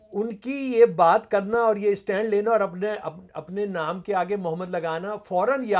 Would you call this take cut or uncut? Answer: uncut